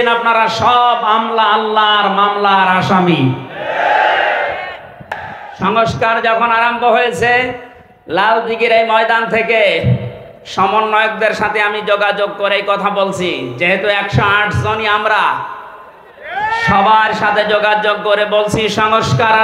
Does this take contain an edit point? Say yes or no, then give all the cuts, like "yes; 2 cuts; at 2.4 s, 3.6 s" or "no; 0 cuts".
yes; 1 cut; at 5.5 s